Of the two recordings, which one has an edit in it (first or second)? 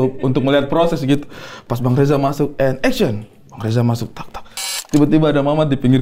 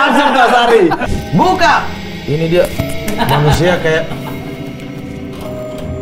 second